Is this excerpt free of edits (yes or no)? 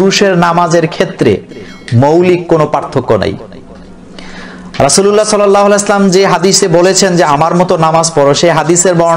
yes